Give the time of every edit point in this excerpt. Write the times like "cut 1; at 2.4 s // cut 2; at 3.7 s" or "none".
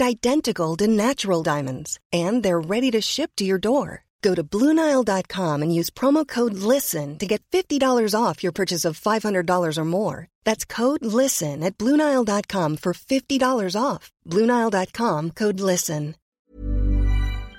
cut 1; at 16.3 s